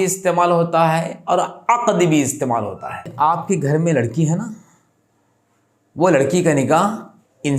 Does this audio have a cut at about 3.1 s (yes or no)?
yes